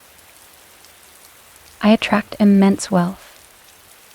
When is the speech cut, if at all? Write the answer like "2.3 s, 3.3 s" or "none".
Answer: 1.8 s, 3.3 s